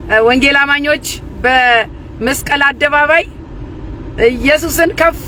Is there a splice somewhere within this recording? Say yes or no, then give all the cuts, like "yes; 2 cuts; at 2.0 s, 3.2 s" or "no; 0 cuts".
no; 0 cuts